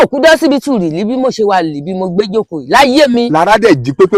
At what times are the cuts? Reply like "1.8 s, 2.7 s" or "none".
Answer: none